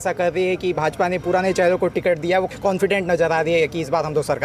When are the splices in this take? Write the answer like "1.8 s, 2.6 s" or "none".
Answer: 2.5 s